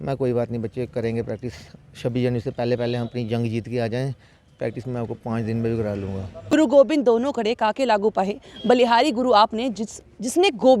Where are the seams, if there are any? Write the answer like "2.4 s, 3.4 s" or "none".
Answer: 6.3 s